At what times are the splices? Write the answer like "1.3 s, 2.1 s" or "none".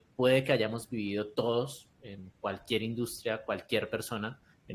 none